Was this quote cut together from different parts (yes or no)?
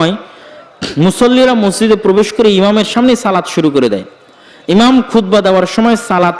no